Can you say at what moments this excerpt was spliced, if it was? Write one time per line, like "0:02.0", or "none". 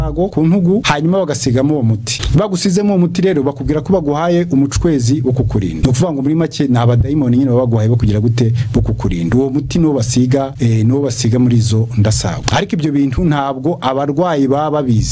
none